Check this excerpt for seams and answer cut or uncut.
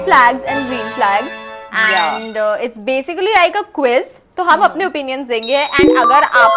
uncut